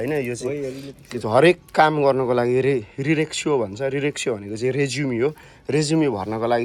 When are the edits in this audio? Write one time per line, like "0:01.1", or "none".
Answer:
none

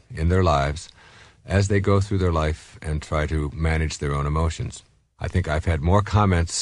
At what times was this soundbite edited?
0:03.9

